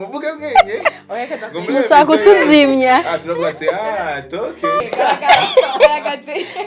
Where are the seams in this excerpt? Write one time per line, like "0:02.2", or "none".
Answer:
0:04.8